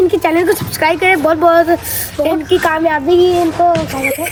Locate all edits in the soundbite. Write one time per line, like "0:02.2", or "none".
none